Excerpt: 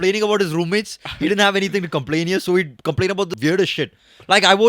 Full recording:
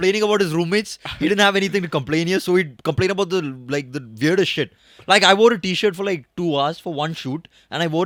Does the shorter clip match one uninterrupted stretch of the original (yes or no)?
no